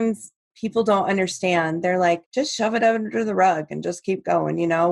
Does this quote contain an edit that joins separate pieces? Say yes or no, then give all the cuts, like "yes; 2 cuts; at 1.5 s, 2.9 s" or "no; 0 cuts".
yes; 1 cut; at 2.3 s